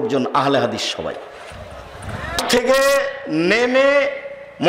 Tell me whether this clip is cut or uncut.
cut